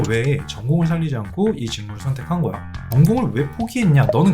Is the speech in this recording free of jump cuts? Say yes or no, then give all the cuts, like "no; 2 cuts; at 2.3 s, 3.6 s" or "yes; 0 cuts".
no; 1 cut; at 2.8 s